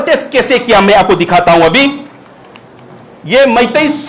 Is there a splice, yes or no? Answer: no